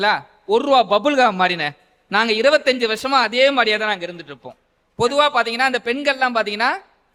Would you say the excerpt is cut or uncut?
uncut